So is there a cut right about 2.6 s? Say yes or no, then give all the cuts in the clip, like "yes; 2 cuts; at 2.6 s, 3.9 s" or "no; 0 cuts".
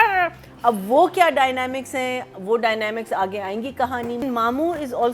no; 1 cut; at 4.2 s